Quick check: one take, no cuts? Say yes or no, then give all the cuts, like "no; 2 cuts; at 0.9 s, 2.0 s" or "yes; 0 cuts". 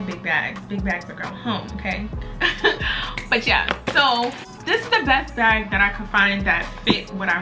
yes; 0 cuts